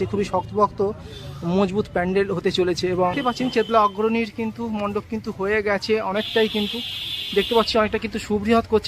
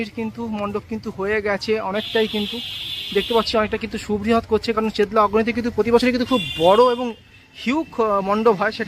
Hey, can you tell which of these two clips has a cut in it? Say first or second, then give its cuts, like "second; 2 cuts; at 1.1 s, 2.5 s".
first; 1 cut; at 3.2 s